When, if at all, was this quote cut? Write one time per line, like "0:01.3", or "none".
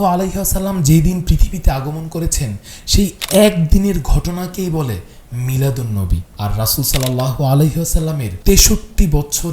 0:06.3
0:08.3